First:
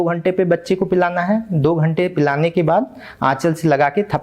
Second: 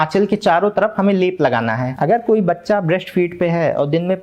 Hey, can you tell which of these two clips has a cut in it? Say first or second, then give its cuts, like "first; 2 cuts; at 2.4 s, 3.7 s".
second; 1 cut; at 1.9 s